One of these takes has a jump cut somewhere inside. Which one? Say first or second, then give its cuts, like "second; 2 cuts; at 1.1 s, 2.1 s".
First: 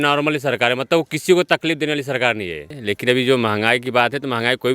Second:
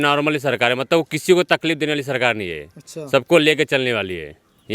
first; 1 cut; at 2.8 s